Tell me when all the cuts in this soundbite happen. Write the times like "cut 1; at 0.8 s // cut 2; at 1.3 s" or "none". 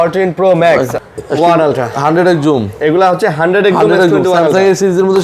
cut 1; at 0.9 s